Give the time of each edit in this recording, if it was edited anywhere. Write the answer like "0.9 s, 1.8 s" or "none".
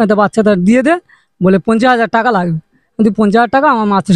none